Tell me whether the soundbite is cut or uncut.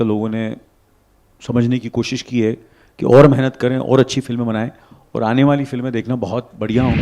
uncut